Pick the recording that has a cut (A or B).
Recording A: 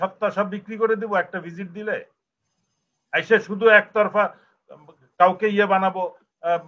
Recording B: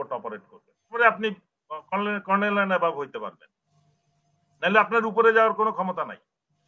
B